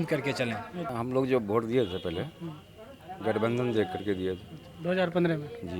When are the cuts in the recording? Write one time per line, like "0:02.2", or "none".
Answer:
0:00.9